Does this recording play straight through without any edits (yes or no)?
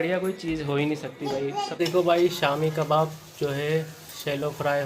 no